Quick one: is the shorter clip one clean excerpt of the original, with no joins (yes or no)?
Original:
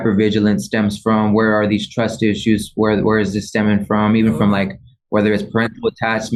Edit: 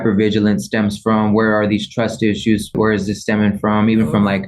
no